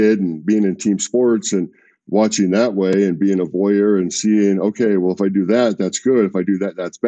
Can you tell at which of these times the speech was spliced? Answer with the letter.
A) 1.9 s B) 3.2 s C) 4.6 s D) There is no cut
D